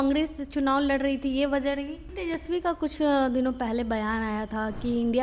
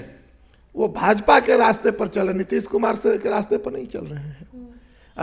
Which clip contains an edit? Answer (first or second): first